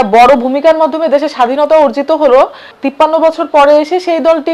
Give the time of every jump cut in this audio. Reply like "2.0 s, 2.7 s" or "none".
2.8 s

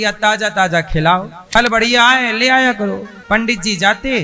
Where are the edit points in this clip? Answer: 1.4 s

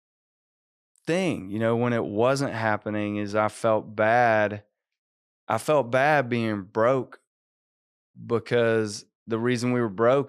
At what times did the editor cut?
none

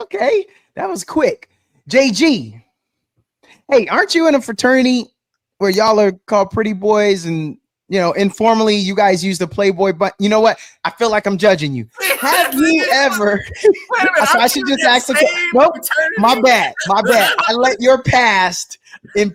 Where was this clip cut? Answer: none

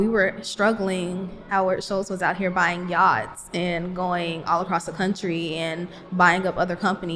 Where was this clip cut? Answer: 1.3 s

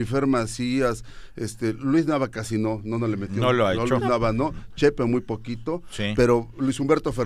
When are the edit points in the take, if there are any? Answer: none

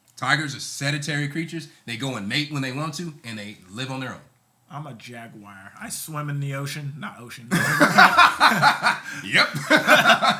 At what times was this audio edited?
none

